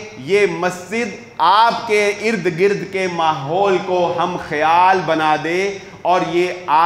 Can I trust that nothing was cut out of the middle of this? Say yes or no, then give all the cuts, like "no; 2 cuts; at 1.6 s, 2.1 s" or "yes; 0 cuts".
yes; 0 cuts